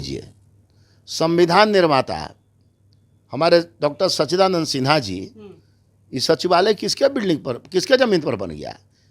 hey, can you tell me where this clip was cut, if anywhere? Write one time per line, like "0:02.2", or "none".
none